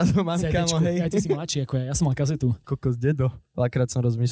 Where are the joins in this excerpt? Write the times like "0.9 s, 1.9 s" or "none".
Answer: 2.6 s, 3.4 s

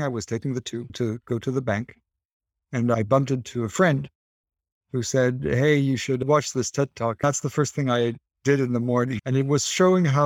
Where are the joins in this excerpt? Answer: 0.9 s, 3.0 s, 7.2 s, 9.2 s

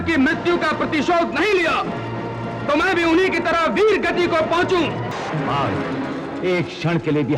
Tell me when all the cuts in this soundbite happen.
5.1 s

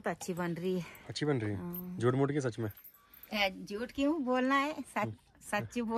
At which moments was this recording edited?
none

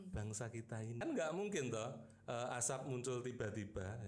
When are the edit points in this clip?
1.0 s

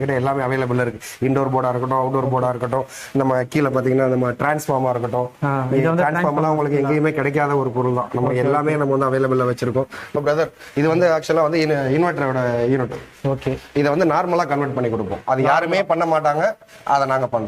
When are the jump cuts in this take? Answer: 10.1 s

